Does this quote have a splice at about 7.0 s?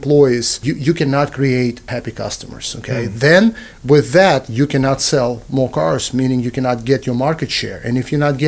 no; 1 cut; at 1.9 s

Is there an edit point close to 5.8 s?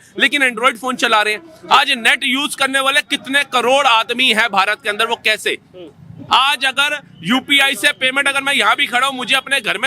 no; 0 cuts

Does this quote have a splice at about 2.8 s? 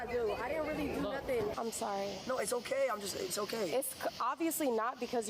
no; 1 cut; at 1.5 s

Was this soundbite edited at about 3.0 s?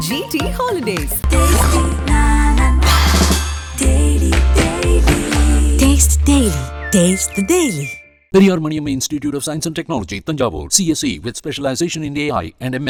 no; 0 cuts

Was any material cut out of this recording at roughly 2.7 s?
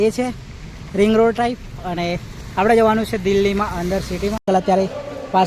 no; 1 cut; at 4.4 s

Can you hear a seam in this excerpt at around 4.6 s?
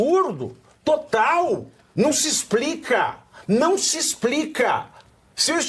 no; 1 cut; at 1.8 s

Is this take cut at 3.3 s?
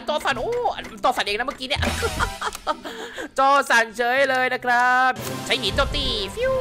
no; 1 cut; at 5.2 s

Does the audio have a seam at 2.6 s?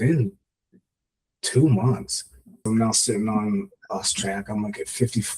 yes; 1 cut; at 2.6 s

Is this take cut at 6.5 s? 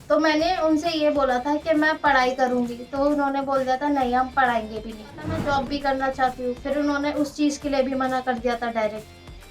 no; 1 cut; at 5.3 s

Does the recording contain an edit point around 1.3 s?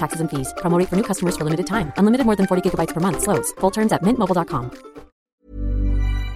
no; 1 cut; at 5.3 s

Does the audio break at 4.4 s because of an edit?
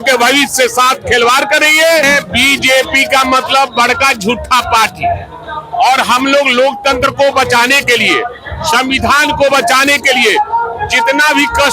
no; 1 cut; at 2.0 s

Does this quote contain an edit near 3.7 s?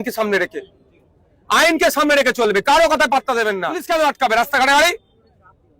yes; 1 cut; at 3.7 s

